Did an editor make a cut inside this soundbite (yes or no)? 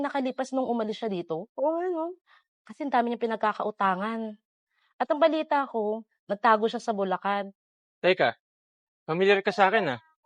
yes